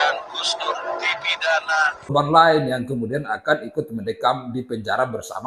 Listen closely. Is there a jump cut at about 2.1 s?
yes; 1 cut; at 2.1 s

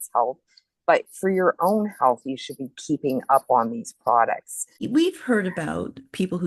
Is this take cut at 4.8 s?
yes; 1 cut; at 4.8 s

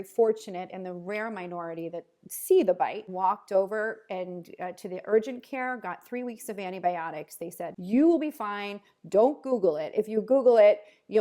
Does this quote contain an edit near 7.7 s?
yes; 2 cuts; at 3.0 s, 7.7 s

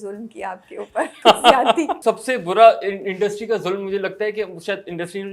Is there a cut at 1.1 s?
yes; 2 cuts; at 1.1 s, 1.9 s

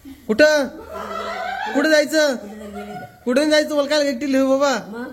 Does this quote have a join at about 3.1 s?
no; 0 cuts

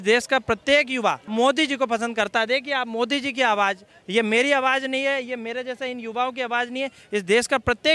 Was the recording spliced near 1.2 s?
yes; 1 cut; at 1.2 s

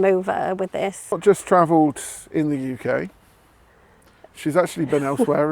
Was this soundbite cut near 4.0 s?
no; 1 cut; at 1.2 s

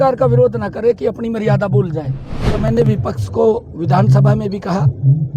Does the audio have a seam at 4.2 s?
no; 1 cut; at 2.7 s

